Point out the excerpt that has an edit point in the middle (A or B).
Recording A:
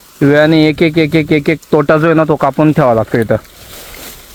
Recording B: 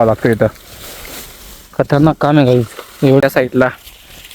B